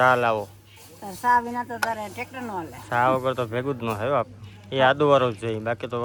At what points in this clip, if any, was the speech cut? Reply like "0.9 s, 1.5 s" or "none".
none